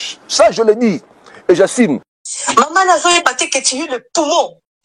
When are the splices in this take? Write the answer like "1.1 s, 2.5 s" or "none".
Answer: 2.1 s